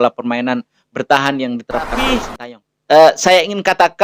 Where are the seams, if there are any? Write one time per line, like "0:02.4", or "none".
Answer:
0:02.2